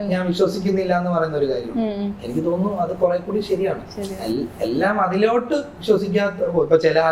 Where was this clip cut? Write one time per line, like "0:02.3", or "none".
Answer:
none